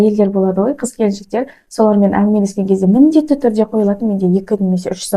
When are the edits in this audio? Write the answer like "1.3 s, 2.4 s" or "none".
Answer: none